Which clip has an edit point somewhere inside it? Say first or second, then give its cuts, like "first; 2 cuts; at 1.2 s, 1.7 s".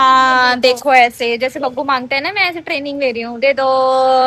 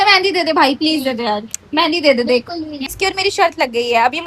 second; 1 cut; at 2.9 s